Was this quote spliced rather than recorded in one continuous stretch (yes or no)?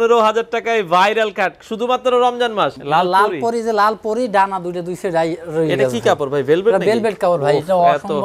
yes